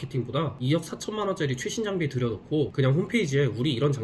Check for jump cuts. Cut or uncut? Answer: uncut